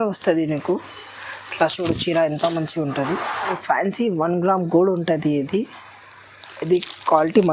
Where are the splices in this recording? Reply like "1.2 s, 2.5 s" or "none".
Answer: 3.6 s